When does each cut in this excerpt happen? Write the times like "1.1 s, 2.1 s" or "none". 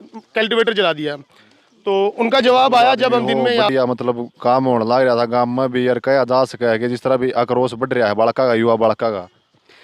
3.7 s